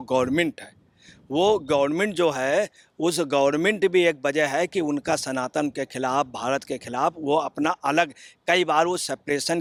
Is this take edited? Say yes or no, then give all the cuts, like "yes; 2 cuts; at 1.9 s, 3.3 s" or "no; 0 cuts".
no; 0 cuts